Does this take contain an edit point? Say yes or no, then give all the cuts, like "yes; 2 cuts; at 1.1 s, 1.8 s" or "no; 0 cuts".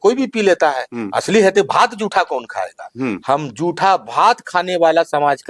no; 0 cuts